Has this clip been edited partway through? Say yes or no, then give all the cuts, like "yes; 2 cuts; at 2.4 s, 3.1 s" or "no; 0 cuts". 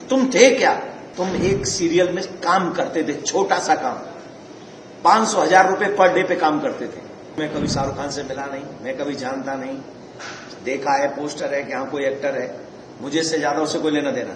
yes; 2 cuts; at 1.0 s, 7.4 s